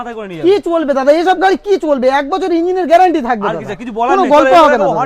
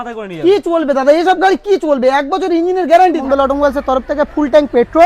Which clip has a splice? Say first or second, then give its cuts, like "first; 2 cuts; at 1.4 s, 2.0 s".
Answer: second; 1 cut; at 3.2 s